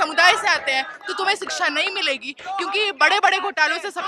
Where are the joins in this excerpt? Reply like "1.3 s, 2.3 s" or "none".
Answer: none